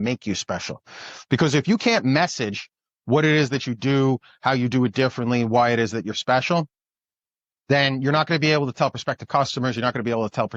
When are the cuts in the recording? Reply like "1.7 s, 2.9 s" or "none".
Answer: none

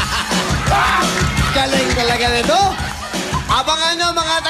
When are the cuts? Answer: none

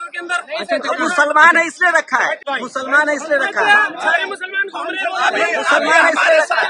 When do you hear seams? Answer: 2.4 s

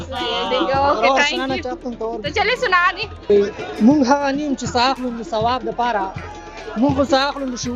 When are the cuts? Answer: 3.3 s

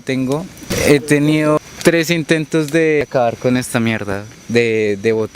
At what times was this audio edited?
1.6 s, 3.0 s

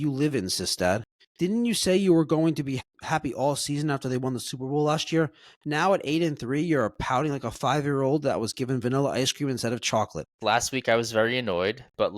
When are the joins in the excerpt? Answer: 1.2 s, 2.8 s, 10.4 s

